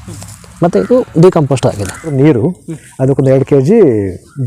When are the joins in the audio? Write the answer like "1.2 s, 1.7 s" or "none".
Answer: 2.1 s